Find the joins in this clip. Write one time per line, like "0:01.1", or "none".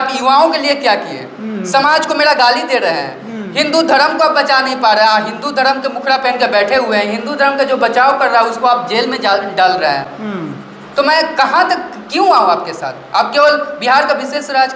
none